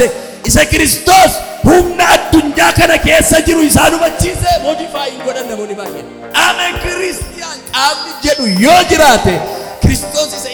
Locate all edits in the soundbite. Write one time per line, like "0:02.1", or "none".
none